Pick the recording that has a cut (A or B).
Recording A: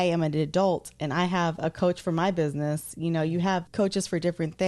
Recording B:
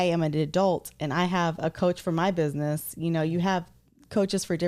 A